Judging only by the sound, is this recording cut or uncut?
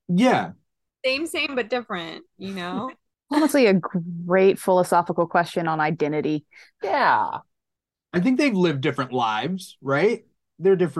cut